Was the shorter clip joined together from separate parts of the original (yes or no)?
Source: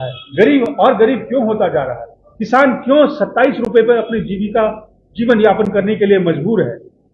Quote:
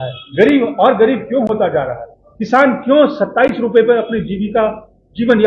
no